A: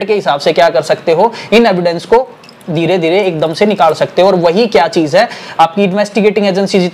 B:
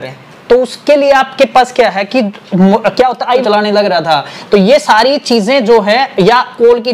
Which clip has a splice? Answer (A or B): B